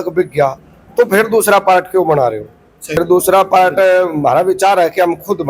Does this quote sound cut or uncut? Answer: cut